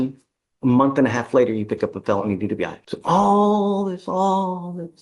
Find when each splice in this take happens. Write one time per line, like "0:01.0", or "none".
0:02.9